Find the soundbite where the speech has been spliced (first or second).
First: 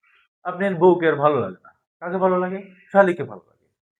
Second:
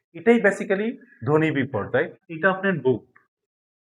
second